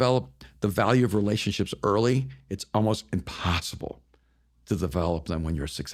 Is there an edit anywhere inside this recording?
no; 0 cuts

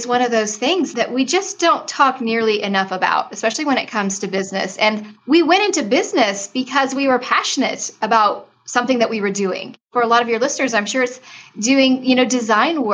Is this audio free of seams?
no; 3 cuts; at 0.9 s, 5.1 s, 9.9 s

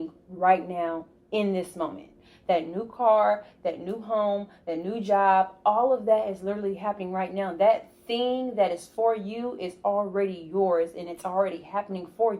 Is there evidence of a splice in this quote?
no; 0 cuts

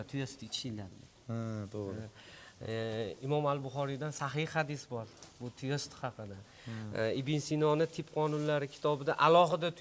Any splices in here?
no; 0 cuts

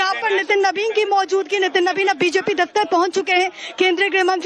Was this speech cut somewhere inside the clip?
no; 0 cuts

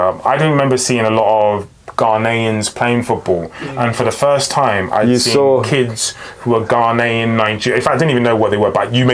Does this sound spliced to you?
no; 0 cuts

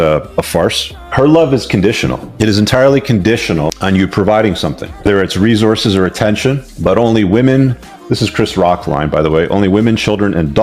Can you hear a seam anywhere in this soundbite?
no; 0 cuts

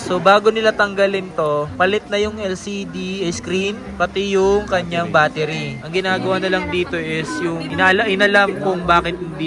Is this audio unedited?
yes; 0 cuts

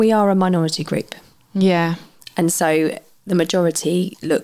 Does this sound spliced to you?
no; 0 cuts

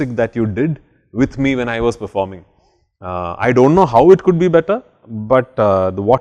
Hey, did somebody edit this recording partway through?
no; 0 cuts

